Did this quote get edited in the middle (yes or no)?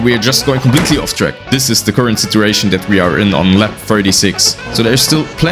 yes